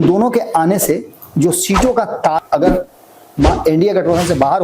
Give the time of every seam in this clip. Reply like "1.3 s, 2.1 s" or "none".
2.4 s